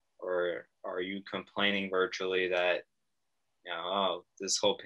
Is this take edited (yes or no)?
no